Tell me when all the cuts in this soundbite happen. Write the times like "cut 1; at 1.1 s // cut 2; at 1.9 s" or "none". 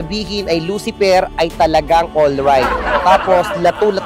none